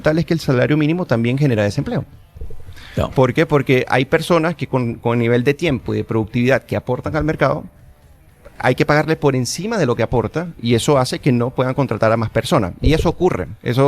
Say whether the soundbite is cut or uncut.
uncut